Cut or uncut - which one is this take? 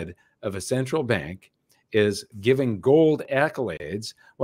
cut